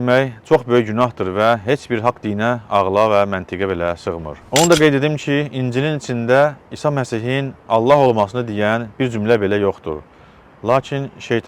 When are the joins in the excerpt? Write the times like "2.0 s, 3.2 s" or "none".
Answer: 4.3 s